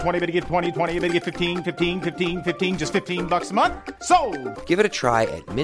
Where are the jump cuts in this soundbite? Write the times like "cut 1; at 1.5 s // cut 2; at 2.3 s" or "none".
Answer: none